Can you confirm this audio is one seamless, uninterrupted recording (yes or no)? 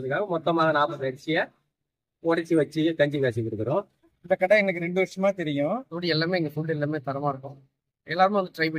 no